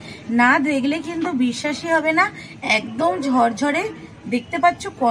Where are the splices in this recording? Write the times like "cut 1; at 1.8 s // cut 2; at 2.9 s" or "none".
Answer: none